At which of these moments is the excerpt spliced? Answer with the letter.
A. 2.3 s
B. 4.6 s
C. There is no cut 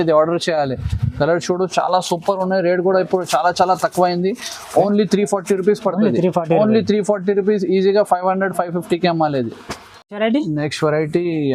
C